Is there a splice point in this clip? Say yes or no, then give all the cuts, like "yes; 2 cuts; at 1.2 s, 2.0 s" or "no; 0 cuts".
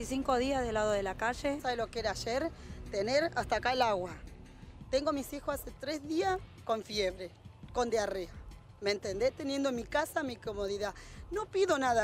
yes; 1 cut; at 1.6 s